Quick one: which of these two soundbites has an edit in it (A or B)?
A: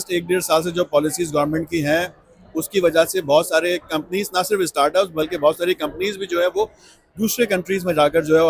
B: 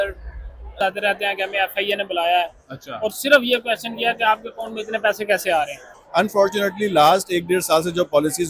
B